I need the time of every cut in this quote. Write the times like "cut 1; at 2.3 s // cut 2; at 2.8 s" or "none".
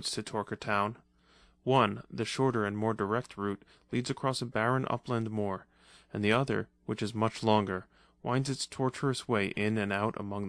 cut 1; at 4.1 s

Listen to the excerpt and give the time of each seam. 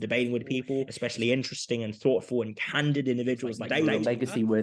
cut 1; at 0.9 s // cut 2; at 3.9 s

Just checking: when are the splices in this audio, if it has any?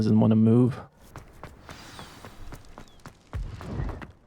cut 1; at 1.1 s

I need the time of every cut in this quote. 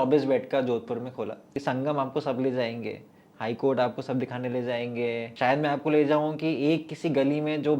cut 1; at 1.6 s // cut 2; at 5.3 s

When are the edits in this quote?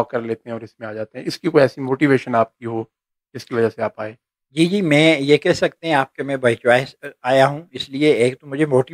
none

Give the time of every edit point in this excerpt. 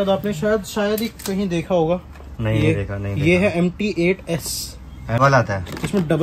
cut 1; at 5.2 s

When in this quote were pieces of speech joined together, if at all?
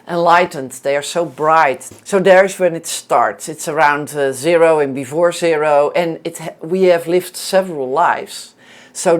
cut 1; at 1.9 s

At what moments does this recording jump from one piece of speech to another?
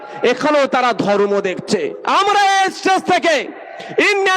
cut 1; at 2.0 s

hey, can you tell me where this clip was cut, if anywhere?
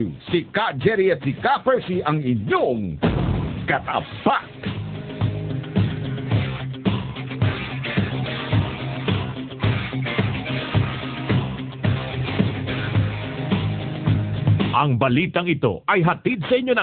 cut 1; at 14.7 s

